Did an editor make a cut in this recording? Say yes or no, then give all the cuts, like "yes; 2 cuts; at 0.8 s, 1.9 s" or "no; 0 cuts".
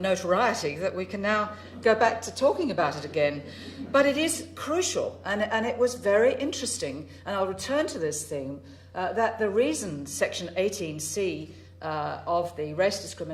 yes; 1 cut; at 3.5 s